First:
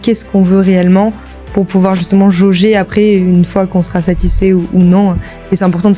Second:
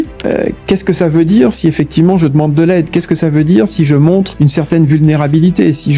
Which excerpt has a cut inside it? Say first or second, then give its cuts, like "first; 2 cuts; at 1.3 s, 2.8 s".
second; 1 cut; at 4.3 s